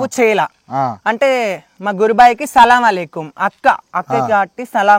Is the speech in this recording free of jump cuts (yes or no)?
yes